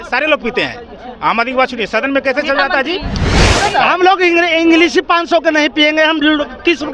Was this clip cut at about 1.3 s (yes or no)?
no